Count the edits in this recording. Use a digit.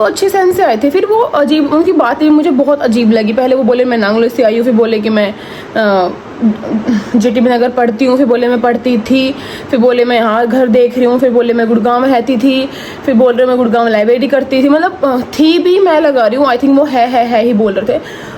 0